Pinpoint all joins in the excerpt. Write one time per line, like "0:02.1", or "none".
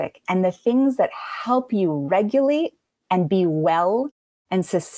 none